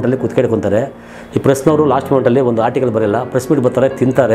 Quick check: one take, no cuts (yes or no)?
yes